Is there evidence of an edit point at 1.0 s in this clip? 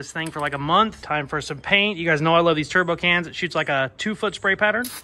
yes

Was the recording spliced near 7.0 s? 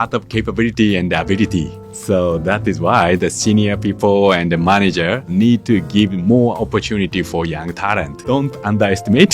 no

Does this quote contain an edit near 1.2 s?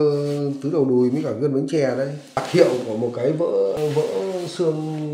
no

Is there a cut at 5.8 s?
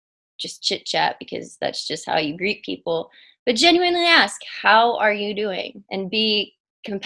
yes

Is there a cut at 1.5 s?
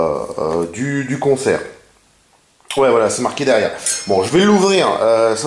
yes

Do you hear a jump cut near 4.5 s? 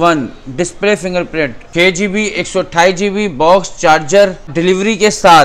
yes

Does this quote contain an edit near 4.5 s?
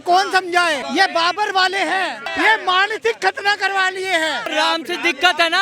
yes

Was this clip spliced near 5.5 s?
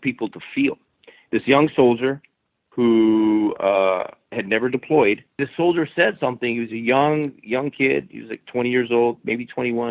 yes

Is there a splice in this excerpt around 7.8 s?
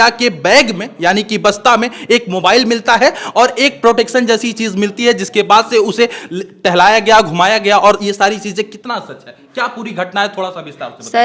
no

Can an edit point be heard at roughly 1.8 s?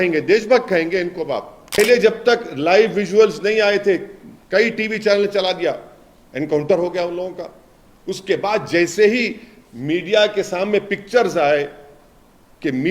yes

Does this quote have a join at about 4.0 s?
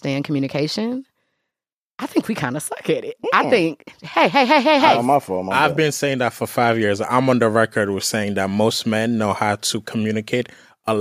no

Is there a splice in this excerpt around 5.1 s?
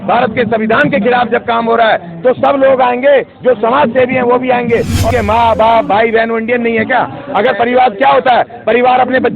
yes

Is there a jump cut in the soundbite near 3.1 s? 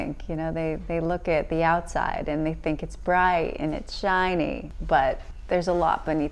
no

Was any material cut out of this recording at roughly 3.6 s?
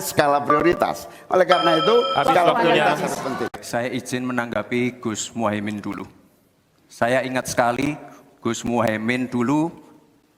yes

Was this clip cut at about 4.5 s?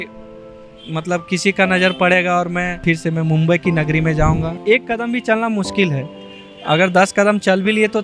yes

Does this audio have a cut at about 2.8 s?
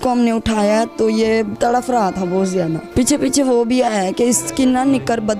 yes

